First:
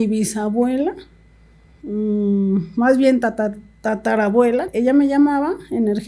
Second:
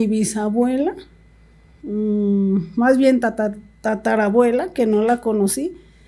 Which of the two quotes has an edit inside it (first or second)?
first